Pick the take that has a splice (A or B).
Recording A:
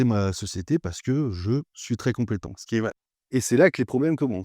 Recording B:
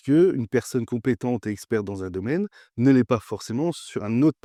A